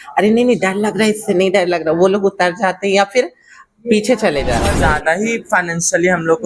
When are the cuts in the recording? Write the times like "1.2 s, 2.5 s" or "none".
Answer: 4.8 s